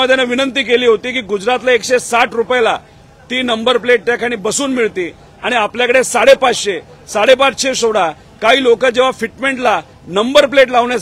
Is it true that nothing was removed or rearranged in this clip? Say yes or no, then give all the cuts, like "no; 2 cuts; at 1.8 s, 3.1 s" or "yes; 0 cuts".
yes; 0 cuts